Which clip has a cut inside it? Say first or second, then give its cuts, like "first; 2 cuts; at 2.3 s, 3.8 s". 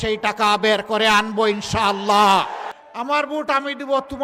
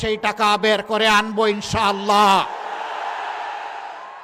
first; 1 cut; at 2.7 s